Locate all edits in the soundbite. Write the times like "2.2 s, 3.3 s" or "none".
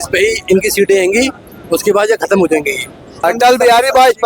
3.2 s